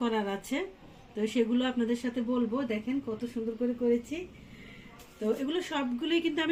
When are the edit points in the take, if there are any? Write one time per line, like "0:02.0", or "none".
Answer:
none